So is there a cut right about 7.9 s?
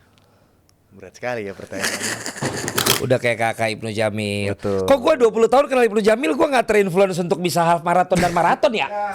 no; 1 cut; at 3.0 s

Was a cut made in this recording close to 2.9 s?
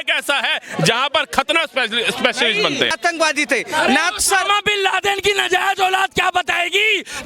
yes; 1 cut; at 2.9 s

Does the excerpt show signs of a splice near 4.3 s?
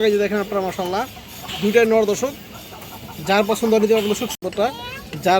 yes; 1 cut; at 4.3 s

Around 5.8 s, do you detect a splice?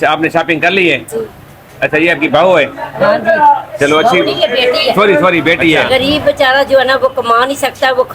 yes; 1 cut; at 5.8 s

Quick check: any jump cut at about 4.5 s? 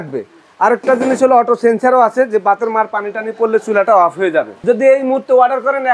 yes; 1 cut; at 4.5 s

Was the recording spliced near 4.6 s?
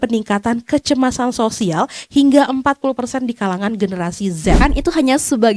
yes; 1 cut; at 4.6 s

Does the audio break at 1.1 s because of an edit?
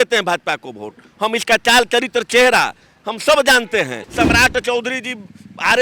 no; 1 cut; at 4.0 s

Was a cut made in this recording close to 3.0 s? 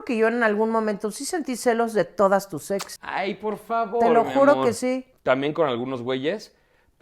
yes; 2 cuts; at 3.0 s, 5.1 s

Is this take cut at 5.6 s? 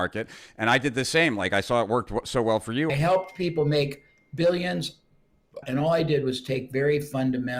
yes; 2 cuts; at 2.9 s, 5.6 s

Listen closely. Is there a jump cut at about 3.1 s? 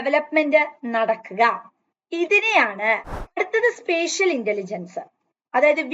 yes; 1 cut; at 3.1 s

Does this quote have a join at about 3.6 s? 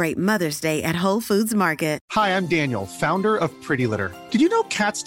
no; 1 cut; at 2.0 s

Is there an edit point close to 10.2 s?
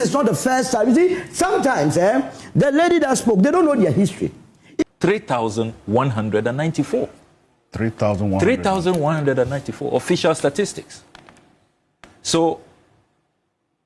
no; 1 cut; at 4.8 s

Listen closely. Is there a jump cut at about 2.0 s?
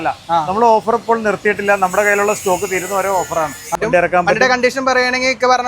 no; 1 cut; at 3.7 s

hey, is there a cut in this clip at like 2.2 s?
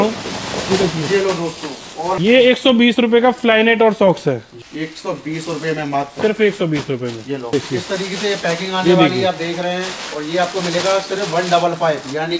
yes; 3 cuts; at 2.2 s, 4.6 s, 7.5 s

